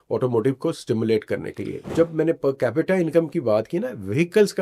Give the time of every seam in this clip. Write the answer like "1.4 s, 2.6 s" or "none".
1.9 s